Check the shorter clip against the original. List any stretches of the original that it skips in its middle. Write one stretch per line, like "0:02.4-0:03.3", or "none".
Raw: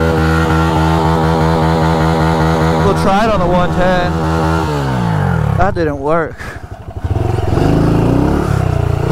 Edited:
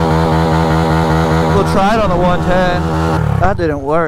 0:04.5-0:05.4